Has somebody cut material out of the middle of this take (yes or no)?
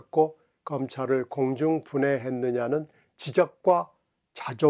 no